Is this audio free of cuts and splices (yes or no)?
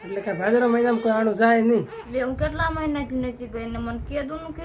no